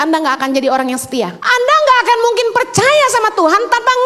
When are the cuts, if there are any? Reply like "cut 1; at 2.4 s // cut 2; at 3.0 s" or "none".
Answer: cut 1; at 1.4 s

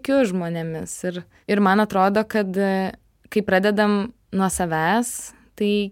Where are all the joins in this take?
cut 1; at 1.3 s // cut 2; at 4.2 s

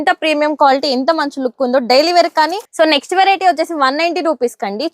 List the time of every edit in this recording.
cut 1; at 2.6 s

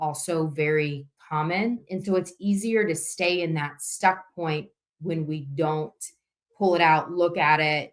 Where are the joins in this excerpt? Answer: none

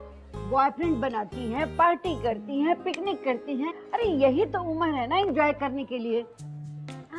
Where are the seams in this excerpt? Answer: cut 1; at 1.7 s

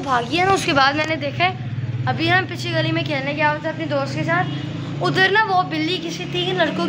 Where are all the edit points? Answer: none

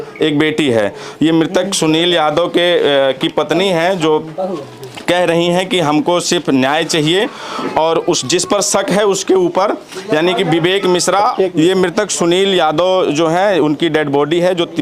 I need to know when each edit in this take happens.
cut 1; at 11.3 s

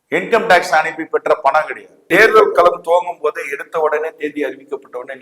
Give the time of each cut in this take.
cut 1; at 2.1 s

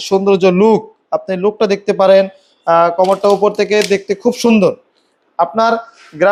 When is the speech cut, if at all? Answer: none

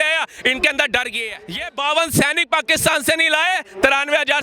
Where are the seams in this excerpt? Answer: cut 1; at 1.6 s

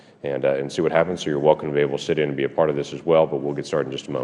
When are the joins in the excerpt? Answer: cut 1; at 2.9 s

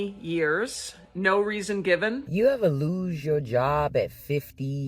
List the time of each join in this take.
cut 1; at 2.2 s

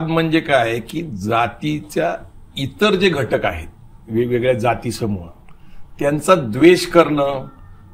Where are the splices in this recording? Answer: none

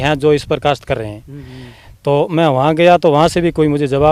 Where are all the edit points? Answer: none

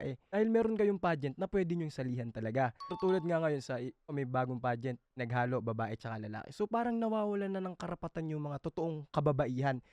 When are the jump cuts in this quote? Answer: none

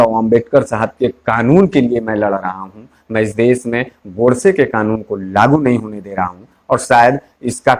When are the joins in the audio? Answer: none

